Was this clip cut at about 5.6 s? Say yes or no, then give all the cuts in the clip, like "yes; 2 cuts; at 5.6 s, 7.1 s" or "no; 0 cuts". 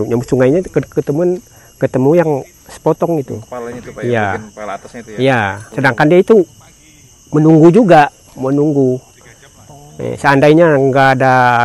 yes; 1 cut; at 5.6 s